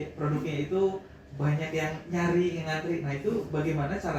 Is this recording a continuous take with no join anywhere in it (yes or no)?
yes